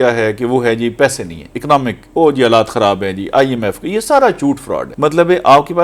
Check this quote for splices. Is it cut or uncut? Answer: cut